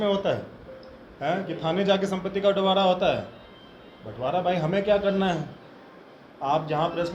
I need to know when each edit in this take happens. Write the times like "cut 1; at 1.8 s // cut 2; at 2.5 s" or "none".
none